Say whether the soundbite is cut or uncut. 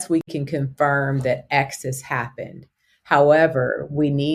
uncut